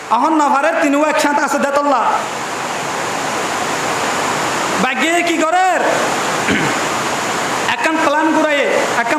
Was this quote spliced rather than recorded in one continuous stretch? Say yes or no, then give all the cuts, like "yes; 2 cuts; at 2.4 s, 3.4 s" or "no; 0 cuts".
no; 0 cuts